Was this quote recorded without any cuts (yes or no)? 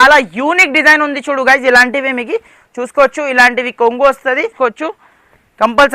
no